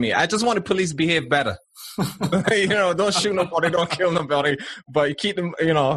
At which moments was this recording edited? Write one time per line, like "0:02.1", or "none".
none

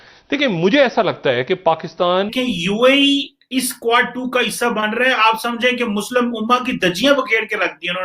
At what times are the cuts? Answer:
0:02.3

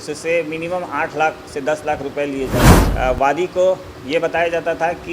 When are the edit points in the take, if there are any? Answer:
0:02.8

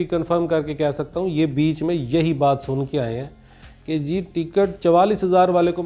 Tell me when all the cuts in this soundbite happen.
none

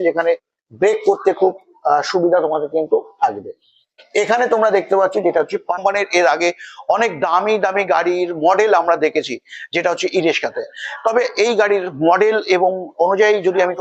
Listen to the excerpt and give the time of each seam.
0:05.8

